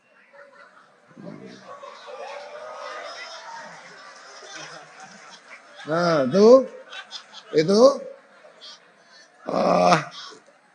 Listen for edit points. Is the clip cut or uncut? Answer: uncut